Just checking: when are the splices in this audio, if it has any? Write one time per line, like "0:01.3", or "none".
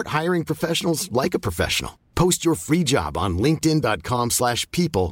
none